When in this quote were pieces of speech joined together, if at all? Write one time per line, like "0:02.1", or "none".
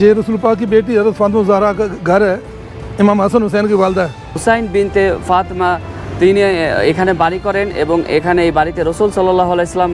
0:04.3